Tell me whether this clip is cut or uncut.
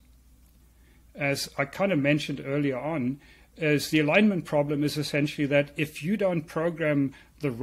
uncut